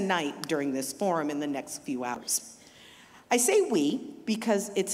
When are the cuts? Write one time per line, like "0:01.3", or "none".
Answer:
0:02.3